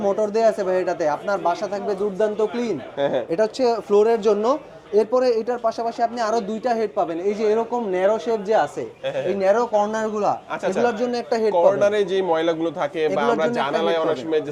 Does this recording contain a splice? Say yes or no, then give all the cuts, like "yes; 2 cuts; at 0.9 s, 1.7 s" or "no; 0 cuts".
no; 0 cuts